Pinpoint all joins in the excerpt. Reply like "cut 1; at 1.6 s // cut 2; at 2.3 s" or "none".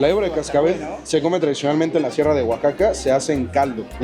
none